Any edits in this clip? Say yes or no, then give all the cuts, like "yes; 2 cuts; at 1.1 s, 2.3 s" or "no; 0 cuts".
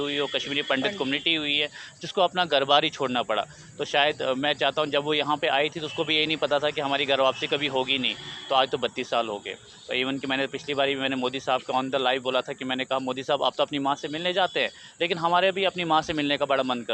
no; 0 cuts